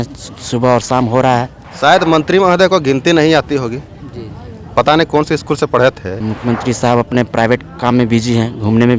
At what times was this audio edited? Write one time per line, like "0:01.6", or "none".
0:01.6
0:06.1